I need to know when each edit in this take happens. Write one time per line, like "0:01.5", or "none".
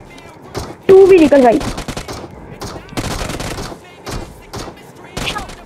none